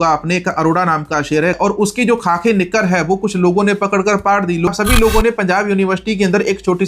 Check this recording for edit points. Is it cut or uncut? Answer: cut